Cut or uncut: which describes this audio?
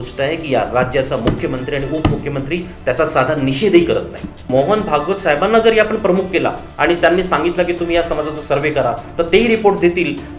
cut